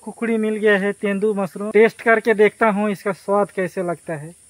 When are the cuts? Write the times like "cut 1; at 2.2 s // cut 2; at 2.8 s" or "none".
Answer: cut 1; at 1.6 s